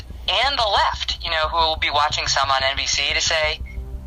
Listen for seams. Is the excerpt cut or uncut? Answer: uncut